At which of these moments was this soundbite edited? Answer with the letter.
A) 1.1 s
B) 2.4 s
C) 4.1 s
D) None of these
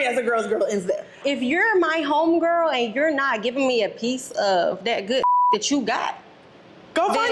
A